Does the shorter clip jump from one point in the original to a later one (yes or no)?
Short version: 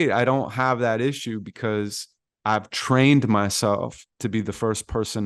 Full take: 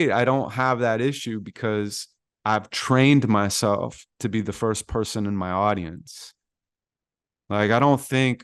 no